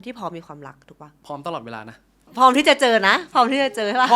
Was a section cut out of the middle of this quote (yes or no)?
yes